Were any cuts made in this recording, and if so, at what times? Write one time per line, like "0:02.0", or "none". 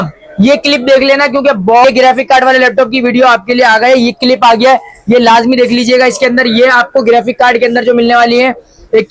0:01.8